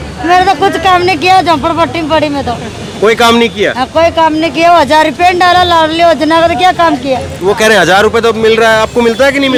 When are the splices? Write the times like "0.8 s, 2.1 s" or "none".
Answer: none